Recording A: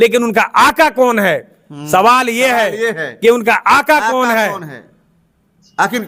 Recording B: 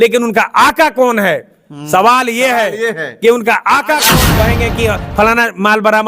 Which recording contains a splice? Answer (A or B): B